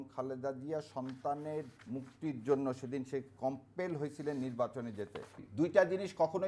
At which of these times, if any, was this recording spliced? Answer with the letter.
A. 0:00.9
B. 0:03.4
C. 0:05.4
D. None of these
C